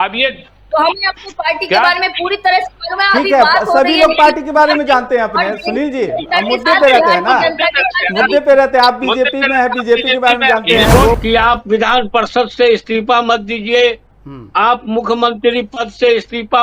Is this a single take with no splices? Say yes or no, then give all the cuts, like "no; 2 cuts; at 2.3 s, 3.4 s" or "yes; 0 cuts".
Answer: no; 1 cut; at 11.2 s